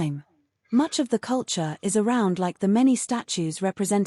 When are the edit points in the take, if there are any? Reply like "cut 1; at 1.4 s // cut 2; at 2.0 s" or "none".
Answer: cut 1; at 2.7 s

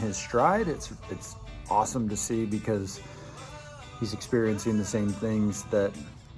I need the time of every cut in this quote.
none

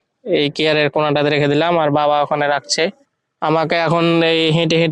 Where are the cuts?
cut 1; at 3.0 s

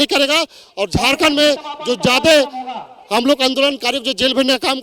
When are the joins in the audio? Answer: none

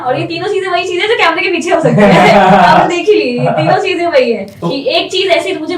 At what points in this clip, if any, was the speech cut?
cut 1; at 4.5 s

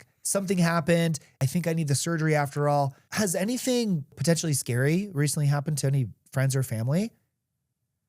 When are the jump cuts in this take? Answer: cut 1; at 1.4 s // cut 2; at 3.0 s // cut 3; at 4.2 s

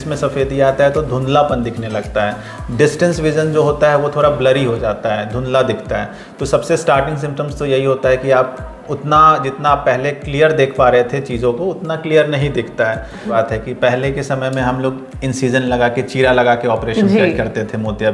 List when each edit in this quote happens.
cut 1; at 13.3 s

